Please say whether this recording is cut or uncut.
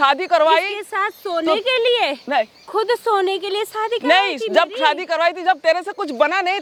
uncut